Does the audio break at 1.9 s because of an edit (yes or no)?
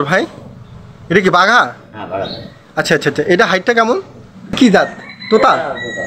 no